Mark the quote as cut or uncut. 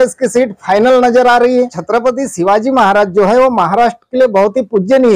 cut